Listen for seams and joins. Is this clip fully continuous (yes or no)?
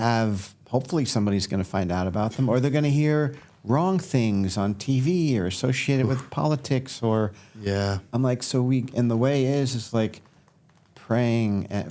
yes